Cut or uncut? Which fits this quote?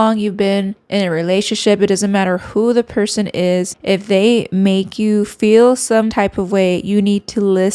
cut